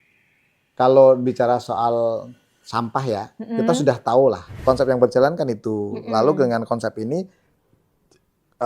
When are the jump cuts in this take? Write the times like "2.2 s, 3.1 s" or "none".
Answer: 4.5 s